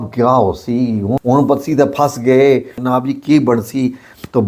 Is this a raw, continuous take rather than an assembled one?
no; 2 cuts; at 1.2 s, 2.8 s

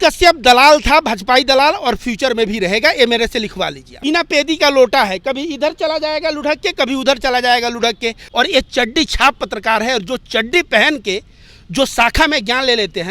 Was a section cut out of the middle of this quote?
yes; 2 cuts; at 4.0 s, 8.2 s

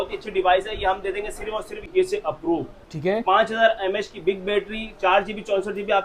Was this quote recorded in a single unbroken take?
no; 1 cut; at 1.9 s

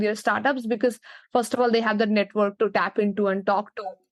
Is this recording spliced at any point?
no; 0 cuts

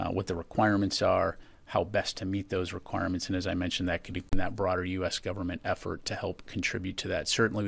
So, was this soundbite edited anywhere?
no; 0 cuts

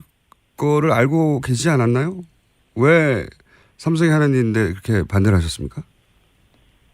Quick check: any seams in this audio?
yes; 1 cut; at 3.3 s

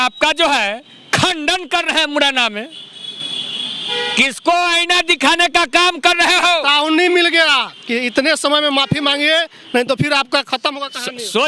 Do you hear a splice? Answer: no; 0 cuts

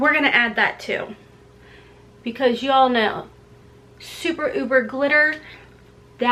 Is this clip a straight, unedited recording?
yes; 0 cuts

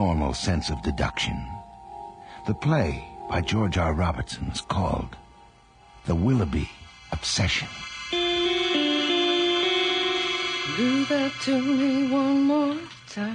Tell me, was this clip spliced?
no; 0 cuts

